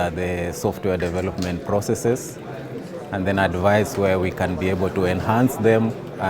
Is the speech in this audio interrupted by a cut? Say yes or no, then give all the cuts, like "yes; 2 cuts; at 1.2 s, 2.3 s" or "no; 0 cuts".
no; 0 cuts